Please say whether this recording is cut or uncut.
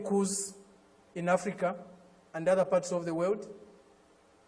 uncut